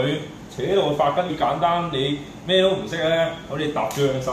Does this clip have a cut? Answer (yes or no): yes